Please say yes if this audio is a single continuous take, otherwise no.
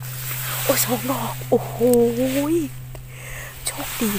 yes